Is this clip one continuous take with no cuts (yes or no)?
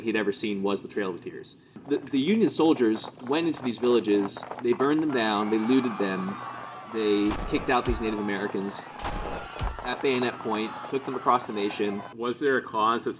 no